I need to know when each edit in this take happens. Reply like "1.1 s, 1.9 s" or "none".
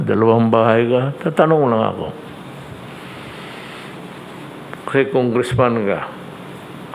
none

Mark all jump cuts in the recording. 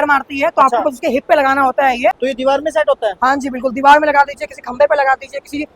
2.2 s

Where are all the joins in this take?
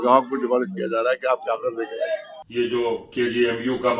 2.4 s

